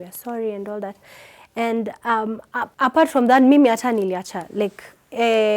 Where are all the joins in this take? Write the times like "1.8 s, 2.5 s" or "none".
2.7 s

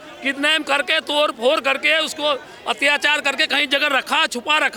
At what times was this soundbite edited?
none

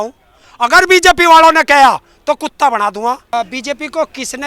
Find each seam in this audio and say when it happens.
3.3 s

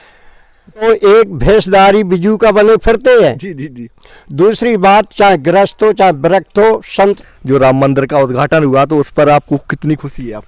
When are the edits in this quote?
0.8 s, 7.2 s

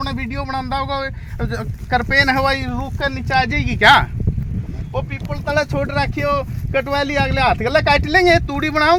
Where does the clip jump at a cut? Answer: none

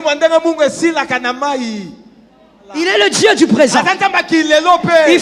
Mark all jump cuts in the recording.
2.7 s

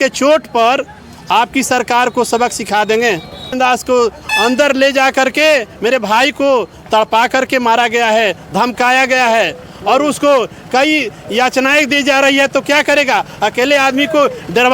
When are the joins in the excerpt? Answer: 3.6 s

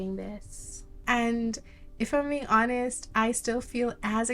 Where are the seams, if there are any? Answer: 0.9 s

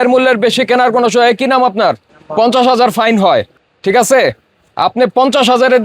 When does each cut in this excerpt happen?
none

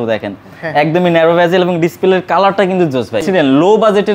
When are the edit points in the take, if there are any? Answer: 3.2 s

